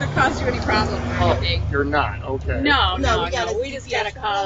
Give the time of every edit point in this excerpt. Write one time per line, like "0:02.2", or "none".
0:02.2